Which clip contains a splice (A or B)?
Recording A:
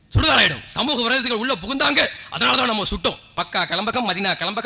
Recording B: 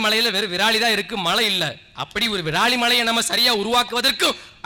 A